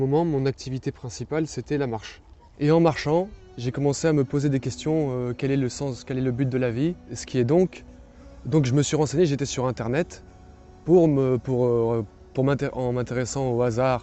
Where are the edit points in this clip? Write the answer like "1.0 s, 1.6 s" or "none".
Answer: 7.2 s